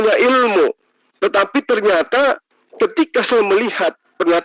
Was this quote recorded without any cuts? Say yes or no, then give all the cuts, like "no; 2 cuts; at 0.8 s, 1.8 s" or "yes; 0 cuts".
yes; 0 cuts